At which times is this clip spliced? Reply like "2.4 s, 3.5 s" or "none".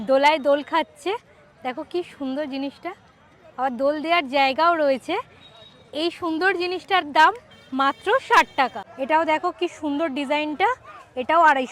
8.8 s

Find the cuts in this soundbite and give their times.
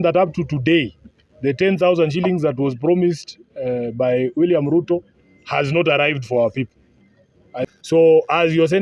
7.7 s

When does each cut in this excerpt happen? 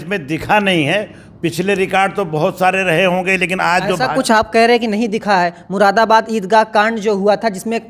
none

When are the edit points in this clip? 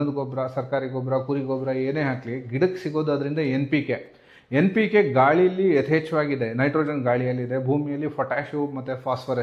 none

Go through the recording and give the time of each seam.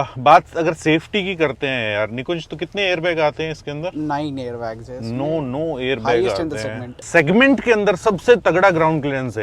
7.0 s

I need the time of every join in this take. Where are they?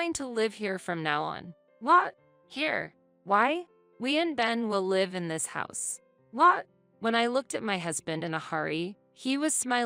none

